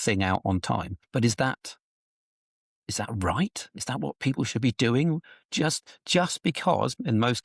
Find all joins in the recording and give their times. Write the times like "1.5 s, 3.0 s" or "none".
1.0 s